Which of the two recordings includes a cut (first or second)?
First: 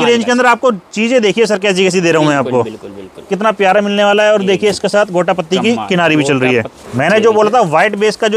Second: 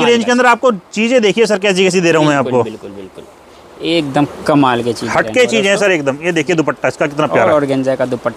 first